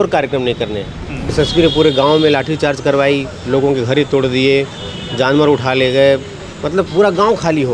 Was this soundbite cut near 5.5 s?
no; 1 cut; at 1.3 s

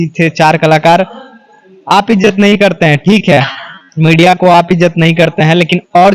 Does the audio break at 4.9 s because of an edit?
no; 0 cuts

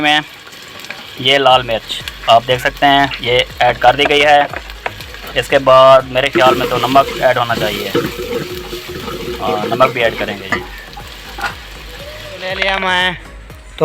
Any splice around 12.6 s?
yes; 1 cut; at 12.6 s

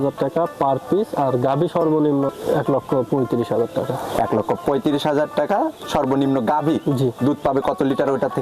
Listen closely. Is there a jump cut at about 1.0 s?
no; 1 cut; at 2.4 s

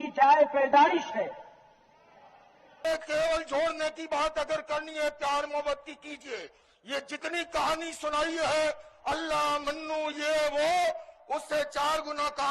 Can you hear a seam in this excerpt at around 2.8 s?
yes; 1 cut; at 2.8 s

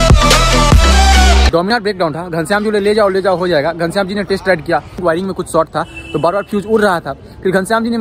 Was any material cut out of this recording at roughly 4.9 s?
yes; 2 cuts; at 1.6 s, 4.9 s

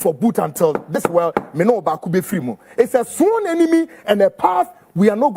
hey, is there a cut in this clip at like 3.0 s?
no; 0 cuts

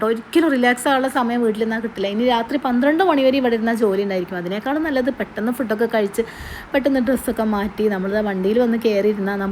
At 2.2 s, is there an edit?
no; 0 cuts

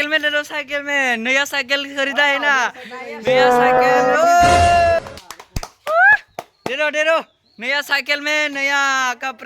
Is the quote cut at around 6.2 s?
no; 1 cut; at 5.0 s

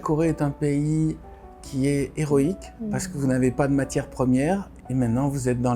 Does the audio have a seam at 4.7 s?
yes; 2 cuts; at 2.7 s, 4.7 s

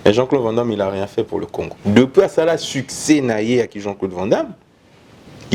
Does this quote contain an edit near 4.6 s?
no; 1 cut; at 1.7 s

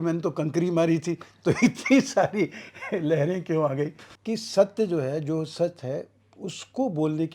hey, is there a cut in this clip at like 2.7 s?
no; 1 cut; at 4.1 s

